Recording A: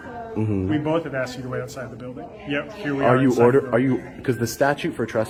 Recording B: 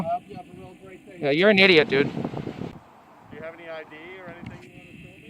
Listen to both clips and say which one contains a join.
B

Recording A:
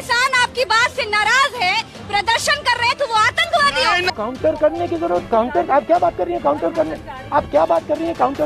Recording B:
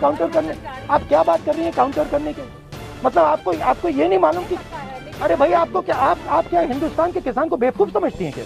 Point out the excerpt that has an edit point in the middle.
A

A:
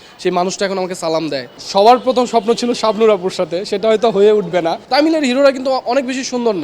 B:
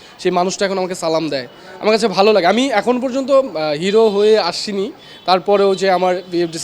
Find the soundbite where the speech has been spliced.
A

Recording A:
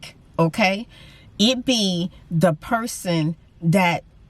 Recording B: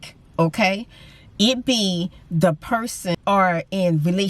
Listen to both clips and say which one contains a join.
B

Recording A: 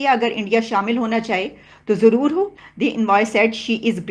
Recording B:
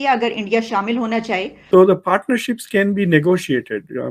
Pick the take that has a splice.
B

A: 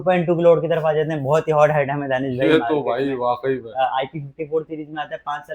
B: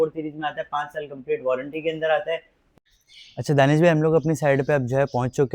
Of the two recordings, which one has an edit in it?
B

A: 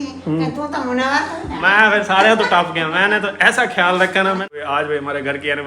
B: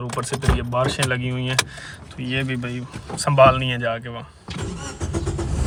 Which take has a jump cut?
A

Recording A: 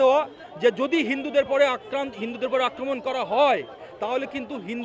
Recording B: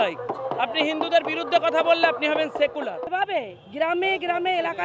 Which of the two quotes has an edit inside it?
B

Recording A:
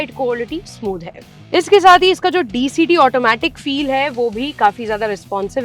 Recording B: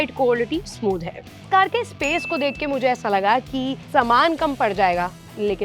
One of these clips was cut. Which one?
B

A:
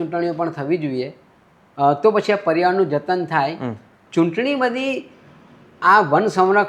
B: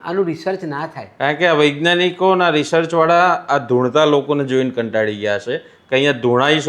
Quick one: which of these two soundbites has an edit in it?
A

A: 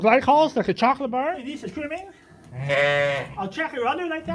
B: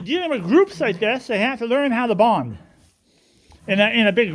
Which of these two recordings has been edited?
A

